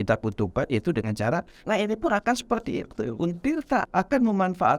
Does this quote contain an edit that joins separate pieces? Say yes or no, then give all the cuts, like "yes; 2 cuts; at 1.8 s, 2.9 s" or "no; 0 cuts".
yes; 2 cuts; at 1.5 s, 3.9 s